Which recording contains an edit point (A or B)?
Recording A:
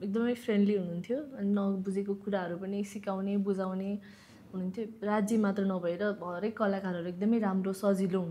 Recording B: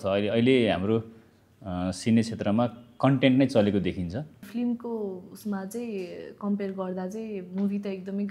B